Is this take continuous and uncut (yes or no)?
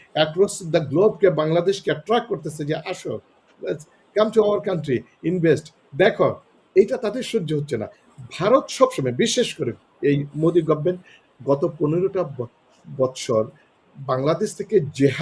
no